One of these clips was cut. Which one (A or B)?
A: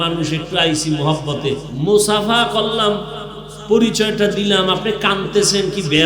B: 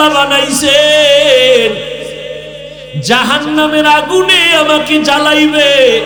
A